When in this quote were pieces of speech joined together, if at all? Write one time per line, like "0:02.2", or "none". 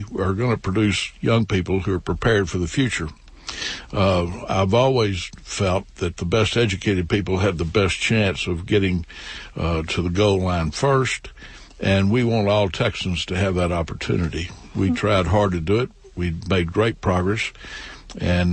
none